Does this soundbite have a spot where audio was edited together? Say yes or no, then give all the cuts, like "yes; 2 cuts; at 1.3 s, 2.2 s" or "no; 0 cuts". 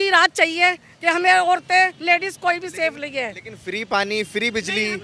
no; 0 cuts